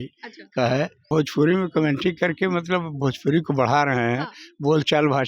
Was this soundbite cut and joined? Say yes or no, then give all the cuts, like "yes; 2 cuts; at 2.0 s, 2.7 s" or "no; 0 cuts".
yes; 1 cut; at 1.0 s